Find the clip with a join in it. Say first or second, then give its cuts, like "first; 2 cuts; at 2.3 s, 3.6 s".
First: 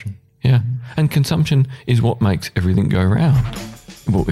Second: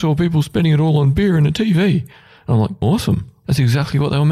second; 1 cut; at 2.7 s